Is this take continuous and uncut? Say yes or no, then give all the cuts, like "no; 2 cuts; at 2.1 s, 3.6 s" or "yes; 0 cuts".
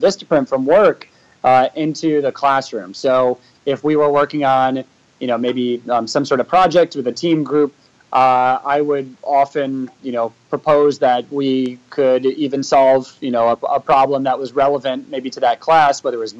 yes; 0 cuts